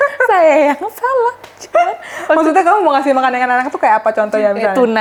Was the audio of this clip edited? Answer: no; 0 cuts

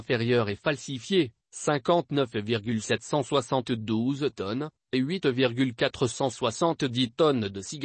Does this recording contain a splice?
no; 0 cuts

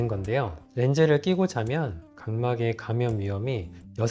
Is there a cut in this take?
no; 0 cuts

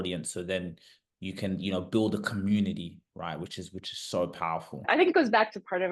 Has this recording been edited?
yes; 1 cut; at 4.9 s

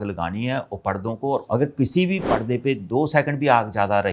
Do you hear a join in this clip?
yes; 2 cuts; at 1.4 s, 2.2 s

